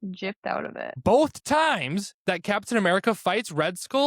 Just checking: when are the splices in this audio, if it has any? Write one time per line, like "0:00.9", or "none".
0:00.9